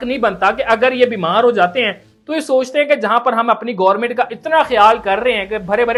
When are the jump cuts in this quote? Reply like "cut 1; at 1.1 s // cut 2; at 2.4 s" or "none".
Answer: none